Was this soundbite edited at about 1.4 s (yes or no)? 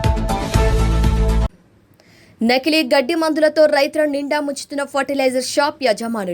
yes